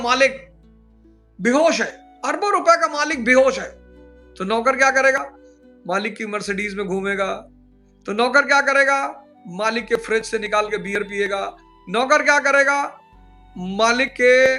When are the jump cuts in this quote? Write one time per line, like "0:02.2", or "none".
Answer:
0:02.0